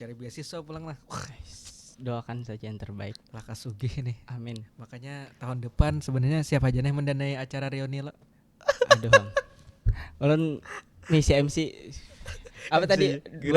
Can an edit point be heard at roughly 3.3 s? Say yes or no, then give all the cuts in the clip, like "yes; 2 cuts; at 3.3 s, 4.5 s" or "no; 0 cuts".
no; 0 cuts